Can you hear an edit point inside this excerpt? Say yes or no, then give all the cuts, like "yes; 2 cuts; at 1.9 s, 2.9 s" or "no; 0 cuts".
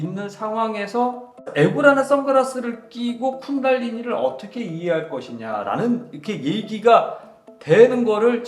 yes; 1 cut; at 1.5 s